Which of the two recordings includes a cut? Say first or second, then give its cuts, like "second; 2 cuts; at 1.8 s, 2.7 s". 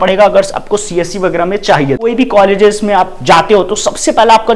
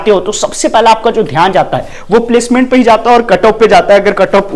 first; 1 cut; at 2.1 s